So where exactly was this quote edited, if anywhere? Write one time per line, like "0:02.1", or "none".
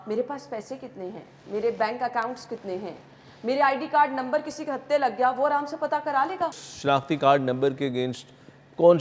0:06.6